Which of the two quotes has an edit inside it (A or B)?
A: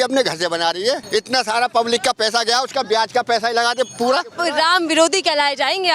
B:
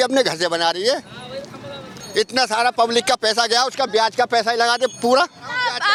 A